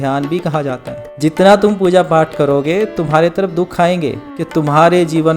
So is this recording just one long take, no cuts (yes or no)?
no